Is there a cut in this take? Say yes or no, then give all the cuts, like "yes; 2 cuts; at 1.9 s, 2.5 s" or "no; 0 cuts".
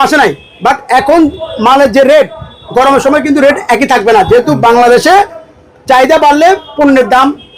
no; 0 cuts